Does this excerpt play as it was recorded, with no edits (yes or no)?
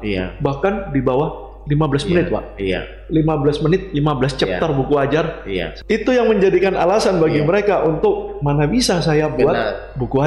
no